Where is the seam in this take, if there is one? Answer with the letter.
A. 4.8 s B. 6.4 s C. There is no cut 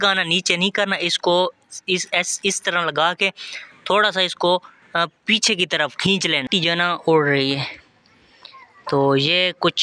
B